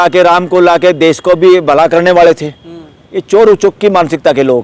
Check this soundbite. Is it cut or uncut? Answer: uncut